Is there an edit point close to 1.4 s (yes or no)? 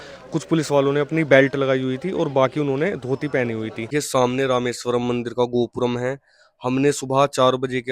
no